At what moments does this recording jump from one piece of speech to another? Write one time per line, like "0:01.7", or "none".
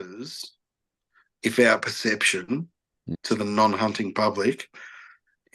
0:03.0